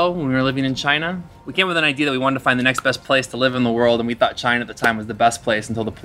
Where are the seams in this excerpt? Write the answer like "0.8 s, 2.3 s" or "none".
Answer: 1.3 s, 3.0 s